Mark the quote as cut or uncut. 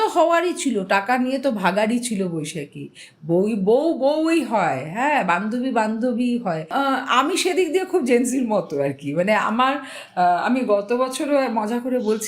cut